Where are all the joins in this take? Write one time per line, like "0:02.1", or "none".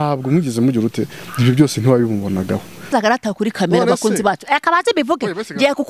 0:02.9